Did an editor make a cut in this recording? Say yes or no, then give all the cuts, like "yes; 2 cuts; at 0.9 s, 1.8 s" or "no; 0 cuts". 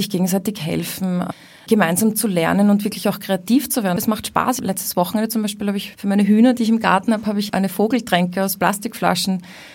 yes; 2 cuts; at 1.3 s, 4.3 s